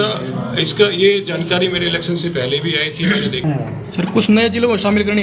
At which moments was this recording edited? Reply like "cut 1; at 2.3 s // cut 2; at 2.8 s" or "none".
cut 1; at 3.4 s

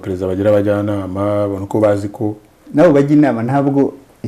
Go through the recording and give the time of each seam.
none

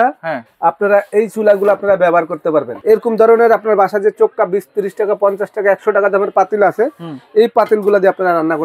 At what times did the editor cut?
cut 1; at 2.7 s

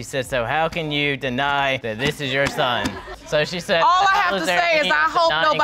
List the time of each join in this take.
none

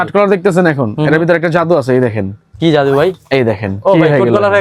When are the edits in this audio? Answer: none

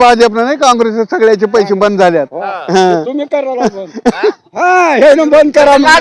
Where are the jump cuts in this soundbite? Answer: none

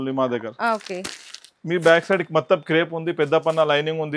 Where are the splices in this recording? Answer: none

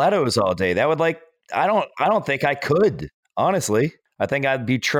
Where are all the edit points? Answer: cut 1; at 4.0 s

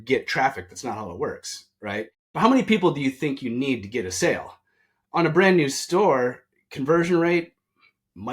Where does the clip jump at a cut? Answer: cut 1; at 2.2 s

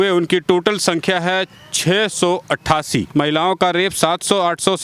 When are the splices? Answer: cut 1; at 3.1 s

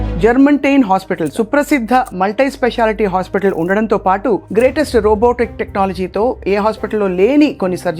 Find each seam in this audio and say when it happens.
cut 1; at 1.3 s

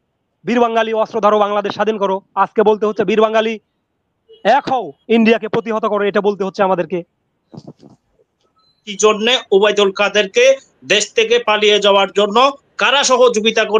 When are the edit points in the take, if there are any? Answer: cut 1; at 8.9 s

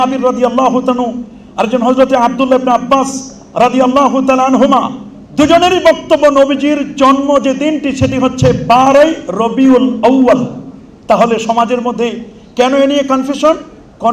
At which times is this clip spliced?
none

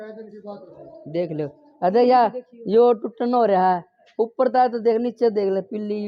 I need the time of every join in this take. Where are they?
none

